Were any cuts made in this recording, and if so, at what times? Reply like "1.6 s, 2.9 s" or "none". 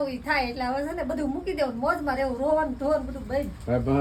none